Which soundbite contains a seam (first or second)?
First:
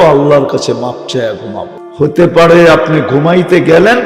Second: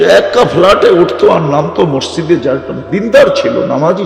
first